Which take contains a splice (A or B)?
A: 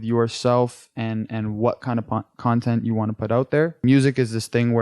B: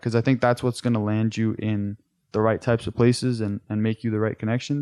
A